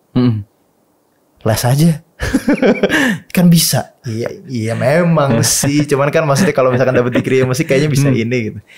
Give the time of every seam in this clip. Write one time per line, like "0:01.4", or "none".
none